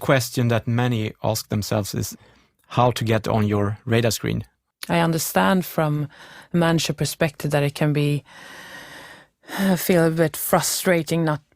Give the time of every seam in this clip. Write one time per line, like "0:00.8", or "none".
0:02.1
0:04.5